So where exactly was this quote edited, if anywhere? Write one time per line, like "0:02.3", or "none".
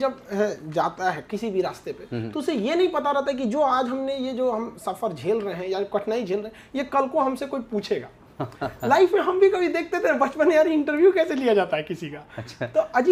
none

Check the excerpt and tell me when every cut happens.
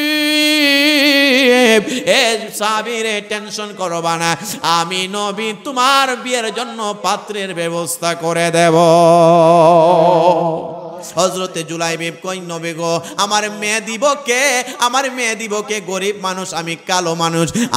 0:11.0

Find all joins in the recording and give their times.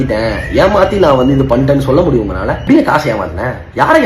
0:02.6

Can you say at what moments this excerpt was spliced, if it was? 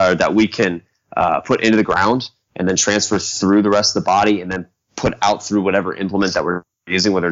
none

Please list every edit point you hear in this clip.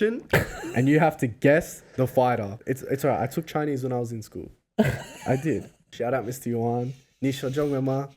0:02.6
0:05.9

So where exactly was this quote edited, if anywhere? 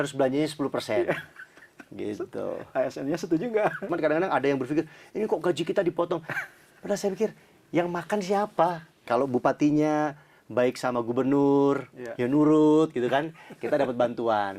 0:03.9
0:09.0

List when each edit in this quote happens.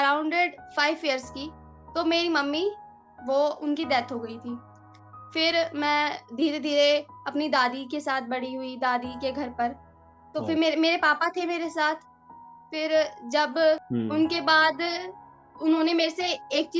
0:13.9

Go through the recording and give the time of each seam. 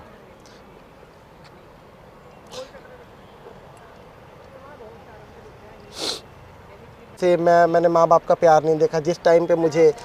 0:07.0

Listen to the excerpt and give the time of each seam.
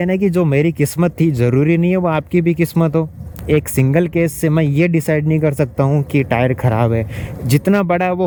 none

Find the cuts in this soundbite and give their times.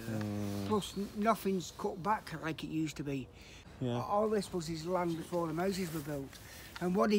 0:03.6

